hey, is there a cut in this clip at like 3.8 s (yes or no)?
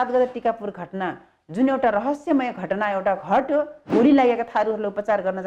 yes